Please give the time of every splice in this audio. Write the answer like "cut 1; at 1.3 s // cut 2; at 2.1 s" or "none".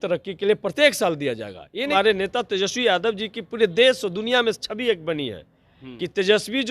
cut 1; at 1.9 s

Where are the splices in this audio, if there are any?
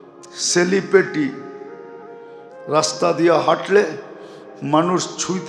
none

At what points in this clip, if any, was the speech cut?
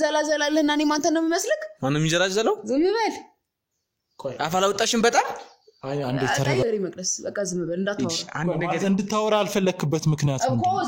cut 1; at 6.6 s

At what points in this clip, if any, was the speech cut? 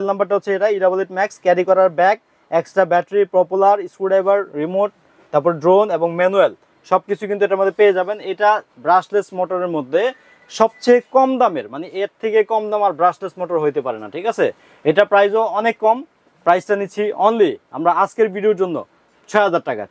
none

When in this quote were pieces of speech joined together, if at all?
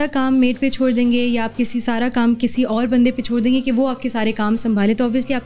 none

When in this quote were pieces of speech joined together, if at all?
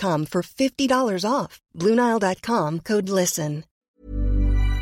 cut 1; at 3.8 s

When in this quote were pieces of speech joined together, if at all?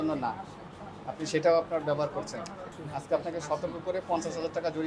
cut 1; at 2.7 s

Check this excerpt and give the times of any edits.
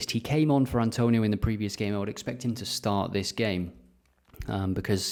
none

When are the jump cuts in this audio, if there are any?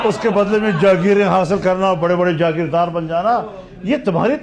none

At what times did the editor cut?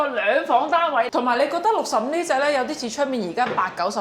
cut 1; at 1.1 s

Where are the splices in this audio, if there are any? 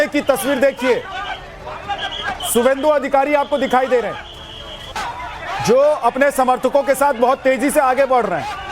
cut 1; at 1.1 s

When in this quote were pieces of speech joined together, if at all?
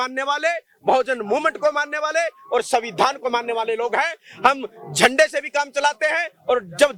none

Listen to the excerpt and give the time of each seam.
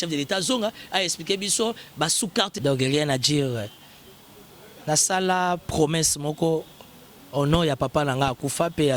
cut 1; at 2.5 s

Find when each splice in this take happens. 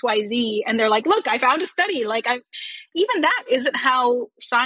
none

